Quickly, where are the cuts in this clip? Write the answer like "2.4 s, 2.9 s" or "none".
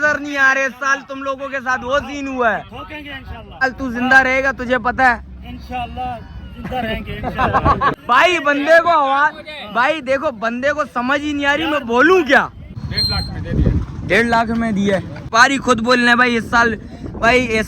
3.6 s, 8.0 s, 12.7 s, 15.2 s